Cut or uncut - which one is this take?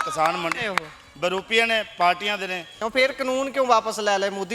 cut